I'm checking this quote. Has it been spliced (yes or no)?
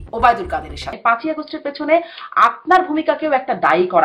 yes